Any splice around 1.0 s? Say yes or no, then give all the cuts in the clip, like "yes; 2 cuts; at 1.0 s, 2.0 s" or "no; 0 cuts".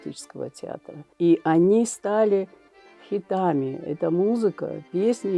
yes; 1 cut; at 1.0 s